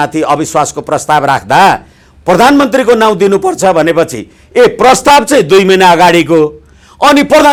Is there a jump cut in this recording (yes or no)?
no